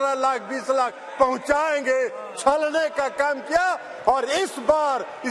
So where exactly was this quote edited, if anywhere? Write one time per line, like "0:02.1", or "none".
none